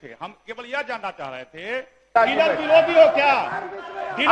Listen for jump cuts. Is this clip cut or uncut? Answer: cut